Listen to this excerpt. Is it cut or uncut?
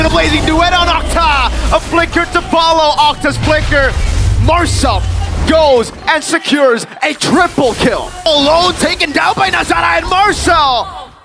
cut